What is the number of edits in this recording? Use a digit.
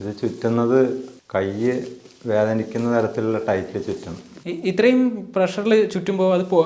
1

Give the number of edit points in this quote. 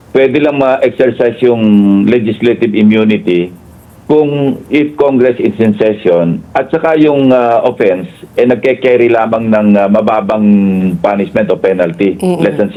0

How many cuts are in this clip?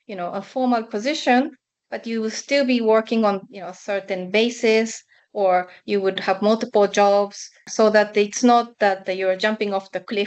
1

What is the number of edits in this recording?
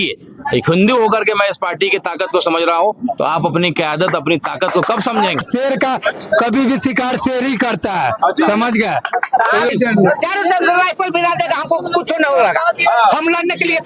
2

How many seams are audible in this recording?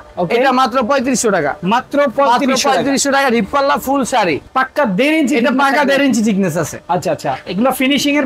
1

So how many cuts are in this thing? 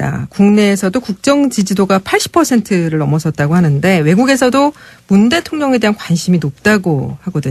0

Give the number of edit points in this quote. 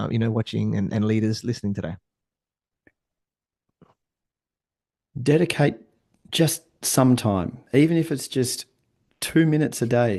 0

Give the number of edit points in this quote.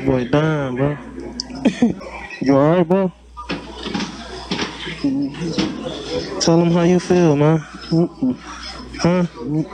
1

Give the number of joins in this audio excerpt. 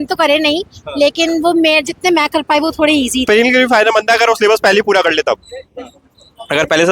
1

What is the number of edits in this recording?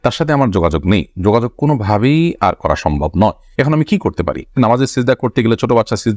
1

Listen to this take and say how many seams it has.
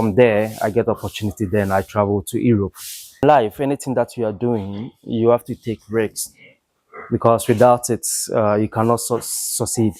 1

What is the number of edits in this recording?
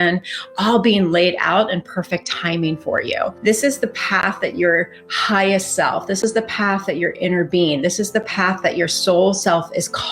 1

